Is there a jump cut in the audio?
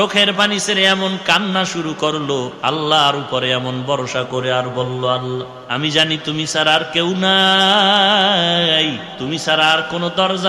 yes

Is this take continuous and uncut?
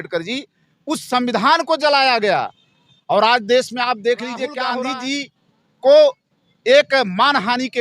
no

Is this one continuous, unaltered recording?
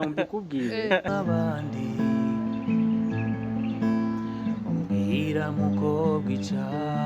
no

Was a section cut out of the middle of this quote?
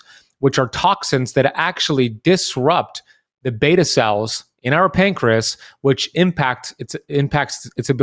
no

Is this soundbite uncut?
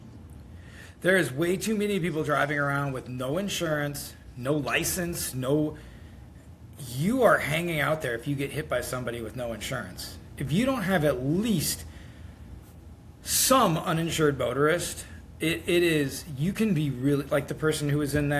yes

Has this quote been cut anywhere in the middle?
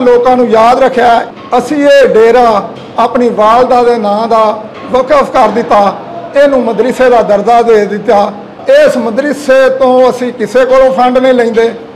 yes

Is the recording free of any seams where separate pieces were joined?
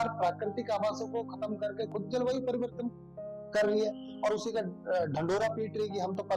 yes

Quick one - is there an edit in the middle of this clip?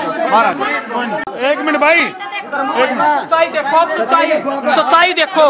yes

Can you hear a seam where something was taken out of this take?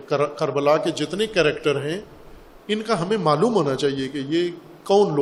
no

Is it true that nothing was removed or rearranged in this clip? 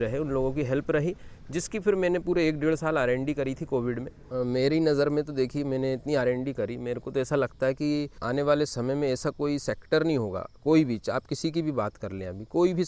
no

